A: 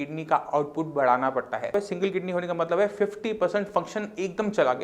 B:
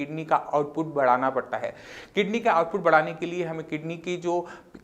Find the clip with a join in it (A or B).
A